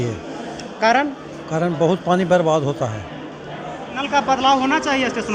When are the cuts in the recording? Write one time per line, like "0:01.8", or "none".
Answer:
0:04.0

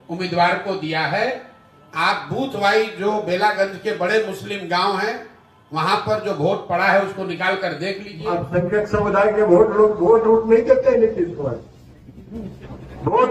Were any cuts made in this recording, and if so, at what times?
0:08.1

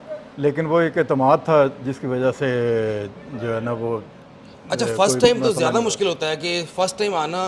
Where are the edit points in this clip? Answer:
none

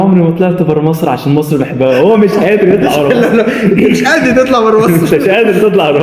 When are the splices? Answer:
none

